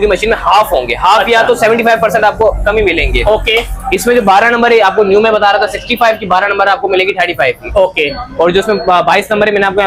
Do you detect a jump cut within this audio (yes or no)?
no